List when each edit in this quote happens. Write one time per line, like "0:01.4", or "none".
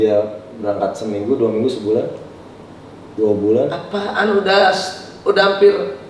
none

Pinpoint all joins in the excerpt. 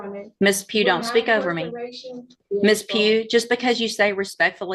0:02.4

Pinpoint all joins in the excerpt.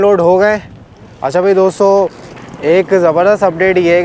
0:01.1

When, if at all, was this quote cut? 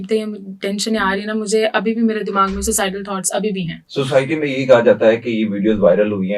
0:03.8

